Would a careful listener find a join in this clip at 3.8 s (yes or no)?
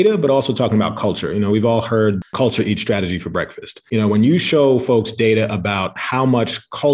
yes